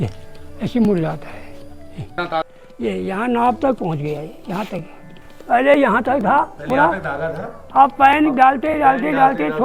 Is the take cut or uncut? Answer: cut